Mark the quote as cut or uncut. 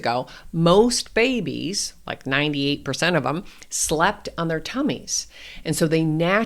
uncut